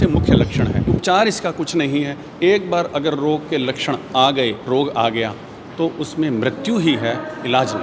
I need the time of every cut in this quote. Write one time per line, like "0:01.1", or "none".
0:01.0